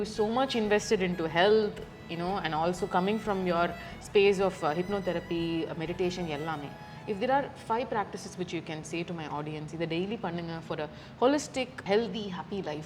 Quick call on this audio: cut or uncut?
cut